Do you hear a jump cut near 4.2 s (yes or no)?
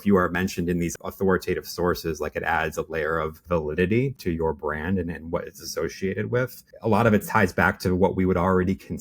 yes